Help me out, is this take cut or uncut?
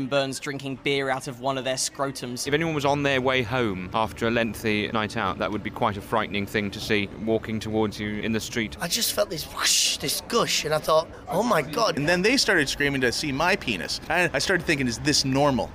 cut